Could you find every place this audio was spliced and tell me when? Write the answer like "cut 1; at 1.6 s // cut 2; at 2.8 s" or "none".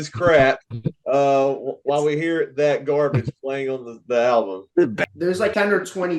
cut 1; at 5.1 s